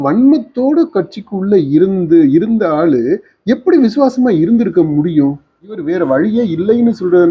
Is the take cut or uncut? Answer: cut